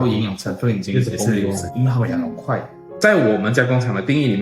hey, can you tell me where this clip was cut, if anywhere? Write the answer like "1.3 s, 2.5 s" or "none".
3.0 s

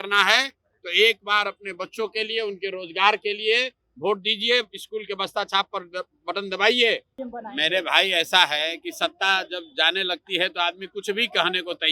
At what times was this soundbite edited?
7.1 s

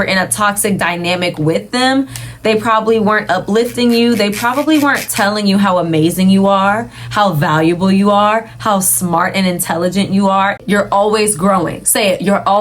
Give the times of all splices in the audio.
10.6 s

